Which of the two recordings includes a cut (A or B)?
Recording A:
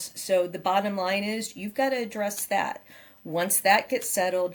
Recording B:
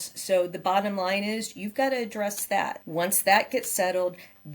B